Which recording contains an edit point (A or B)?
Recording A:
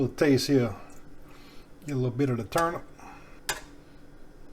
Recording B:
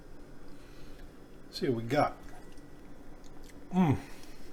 A